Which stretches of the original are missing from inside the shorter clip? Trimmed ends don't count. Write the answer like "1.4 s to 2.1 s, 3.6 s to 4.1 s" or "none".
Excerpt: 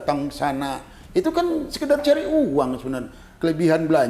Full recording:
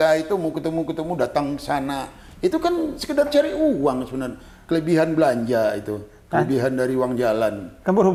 none

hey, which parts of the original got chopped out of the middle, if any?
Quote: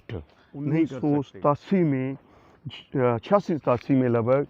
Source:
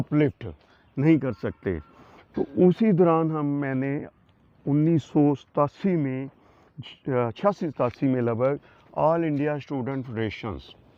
1.2 s to 5.0 s

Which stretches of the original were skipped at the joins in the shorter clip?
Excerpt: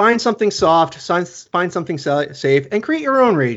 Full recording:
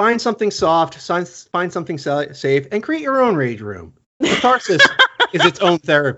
none

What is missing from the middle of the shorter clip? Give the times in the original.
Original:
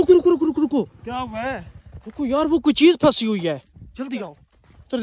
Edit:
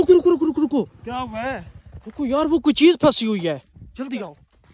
none

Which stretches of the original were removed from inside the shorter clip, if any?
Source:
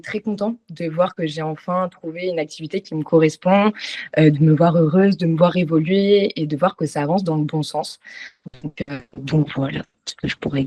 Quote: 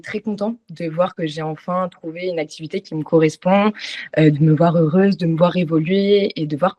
none

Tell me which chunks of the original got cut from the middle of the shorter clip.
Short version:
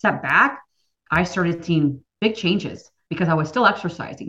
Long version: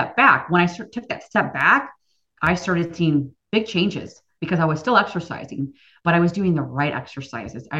none

